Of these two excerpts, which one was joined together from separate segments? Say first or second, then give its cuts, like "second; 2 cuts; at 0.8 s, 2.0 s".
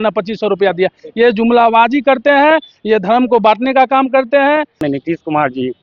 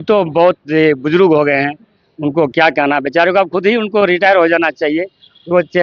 first; 1 cut; at 4.7 s